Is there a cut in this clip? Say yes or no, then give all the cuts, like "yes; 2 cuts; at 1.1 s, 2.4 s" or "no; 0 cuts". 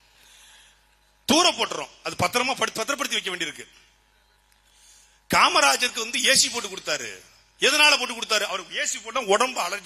no; 0 cuts